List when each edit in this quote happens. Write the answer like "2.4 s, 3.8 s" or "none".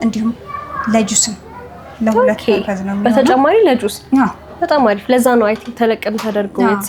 none

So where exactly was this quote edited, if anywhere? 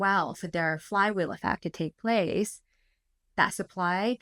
none

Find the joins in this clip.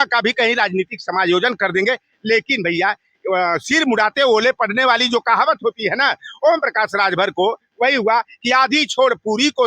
none

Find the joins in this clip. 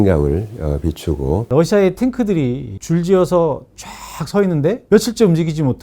1.5 s, 2.7 s, 4.8 s

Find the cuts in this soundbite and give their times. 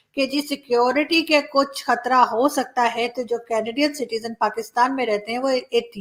none

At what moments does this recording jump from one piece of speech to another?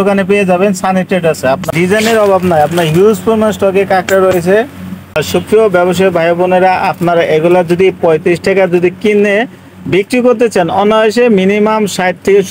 1.7 s, 5.2 s

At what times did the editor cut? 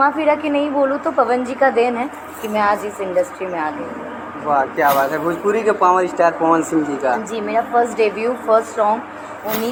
none

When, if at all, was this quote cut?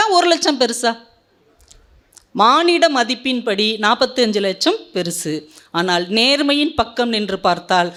none

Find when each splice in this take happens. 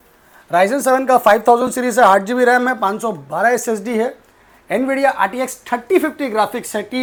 none

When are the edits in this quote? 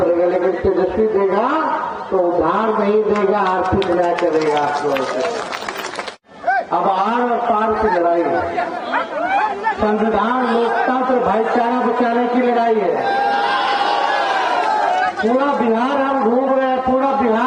none

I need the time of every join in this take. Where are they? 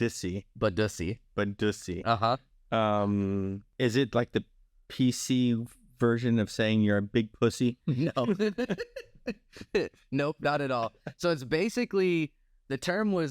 3.6 s

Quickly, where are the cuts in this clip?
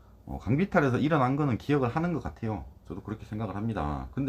none

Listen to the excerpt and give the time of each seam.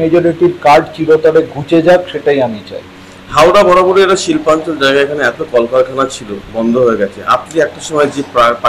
none

